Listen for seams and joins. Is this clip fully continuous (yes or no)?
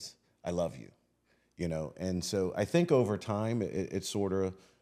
yes